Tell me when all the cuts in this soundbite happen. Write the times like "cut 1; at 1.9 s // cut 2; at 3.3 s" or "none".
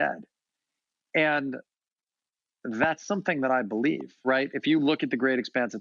cut 1; at 4.1 s